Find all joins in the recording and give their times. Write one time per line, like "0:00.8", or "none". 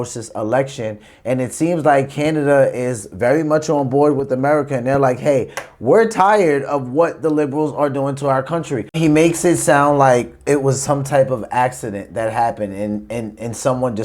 0:09.0